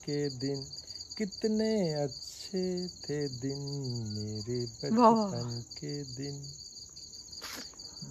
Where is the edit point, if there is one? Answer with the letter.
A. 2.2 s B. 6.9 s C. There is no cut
C